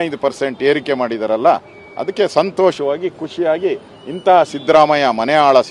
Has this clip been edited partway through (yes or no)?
no